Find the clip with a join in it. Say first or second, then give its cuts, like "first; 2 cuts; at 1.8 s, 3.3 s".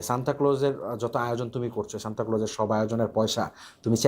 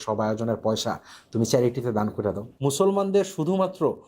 second; 1 cut; at 2.5 s